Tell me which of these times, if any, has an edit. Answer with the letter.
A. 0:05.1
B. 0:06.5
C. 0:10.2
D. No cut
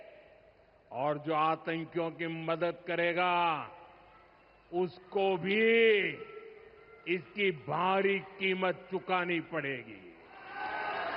D